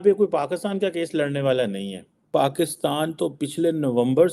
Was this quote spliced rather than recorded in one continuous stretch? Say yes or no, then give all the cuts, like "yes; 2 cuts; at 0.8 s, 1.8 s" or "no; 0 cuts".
yes; 1 cut; at 2.3 s